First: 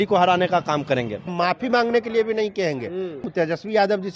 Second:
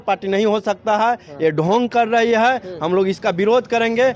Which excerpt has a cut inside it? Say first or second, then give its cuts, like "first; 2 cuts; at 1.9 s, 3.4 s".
first; 2 cuts; at 1.3 s, 3.3 s